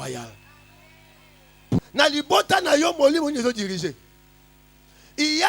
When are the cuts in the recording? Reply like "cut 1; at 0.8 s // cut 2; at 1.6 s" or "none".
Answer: cut 1; at 1.8 s